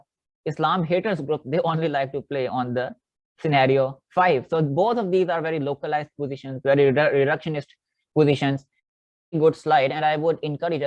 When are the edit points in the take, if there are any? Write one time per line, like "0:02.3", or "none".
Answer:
0:09.0